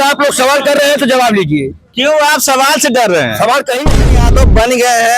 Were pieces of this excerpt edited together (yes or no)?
yes